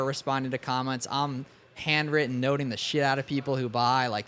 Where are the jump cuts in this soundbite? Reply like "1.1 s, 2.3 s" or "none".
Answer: none